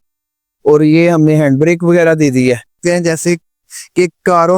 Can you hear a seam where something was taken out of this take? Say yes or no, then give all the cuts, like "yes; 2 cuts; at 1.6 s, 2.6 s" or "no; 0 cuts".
yes; 1 cut; at 2.8 s